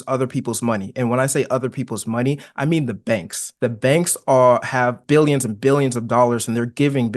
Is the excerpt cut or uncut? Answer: cut